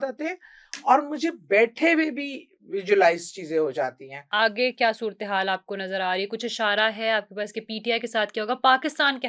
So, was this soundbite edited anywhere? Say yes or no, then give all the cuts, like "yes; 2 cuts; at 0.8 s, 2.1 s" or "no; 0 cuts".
yes; 1 cut; at 4.2 s